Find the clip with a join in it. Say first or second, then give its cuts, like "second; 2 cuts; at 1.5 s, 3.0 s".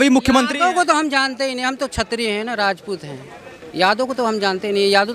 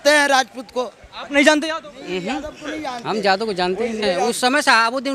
second; 1 cut; at 4.1 s